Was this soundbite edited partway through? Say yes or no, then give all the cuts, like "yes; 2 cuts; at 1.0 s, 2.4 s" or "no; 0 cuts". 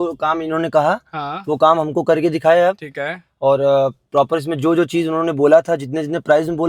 no; 0 cuts